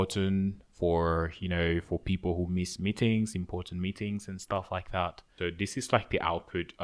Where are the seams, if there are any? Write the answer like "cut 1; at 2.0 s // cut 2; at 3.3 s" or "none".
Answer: cut 1; at 5.3 s